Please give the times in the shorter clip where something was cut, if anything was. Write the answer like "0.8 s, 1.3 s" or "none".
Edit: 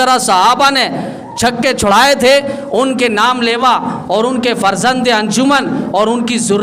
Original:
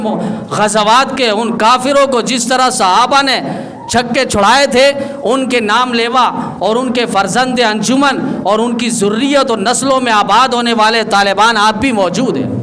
none